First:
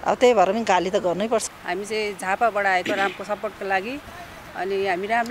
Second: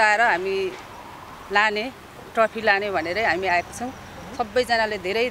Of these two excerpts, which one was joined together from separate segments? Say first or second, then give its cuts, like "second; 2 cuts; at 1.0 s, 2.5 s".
first; 1 cut; at 1.5 s